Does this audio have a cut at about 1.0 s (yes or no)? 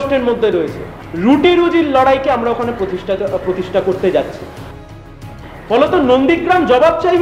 no